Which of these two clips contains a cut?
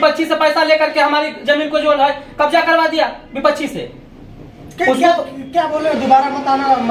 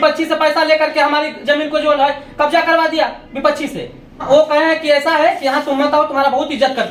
second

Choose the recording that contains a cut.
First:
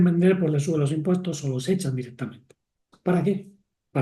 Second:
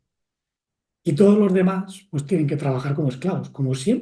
first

